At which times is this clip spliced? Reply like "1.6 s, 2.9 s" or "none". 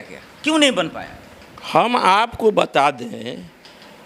none